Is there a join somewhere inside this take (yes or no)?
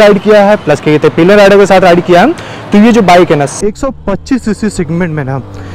yes